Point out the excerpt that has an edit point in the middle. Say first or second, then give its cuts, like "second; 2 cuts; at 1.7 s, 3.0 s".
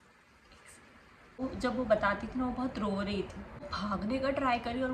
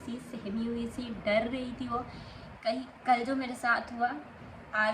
first; 2 cuts; at 1.4 s, 3.7 s